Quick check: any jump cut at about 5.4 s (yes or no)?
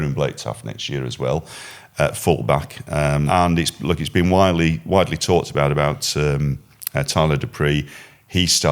no